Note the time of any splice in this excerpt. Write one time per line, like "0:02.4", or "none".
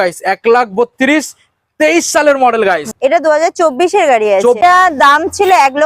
0:02.9
0:04.6